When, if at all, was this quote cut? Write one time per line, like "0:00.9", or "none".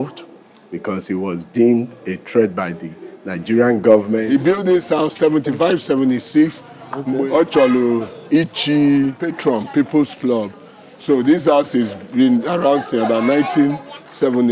0:04.2
0:07.2
0:09.3